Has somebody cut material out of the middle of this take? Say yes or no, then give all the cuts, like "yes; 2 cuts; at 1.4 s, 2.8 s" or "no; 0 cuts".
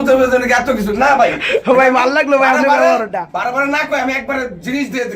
no; 0 cuts